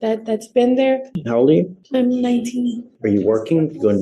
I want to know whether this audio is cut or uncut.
cut